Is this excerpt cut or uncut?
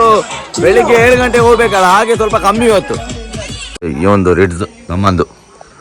cut